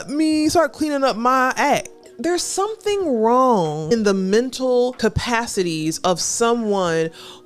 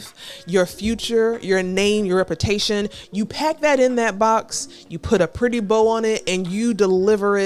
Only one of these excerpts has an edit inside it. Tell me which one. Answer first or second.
first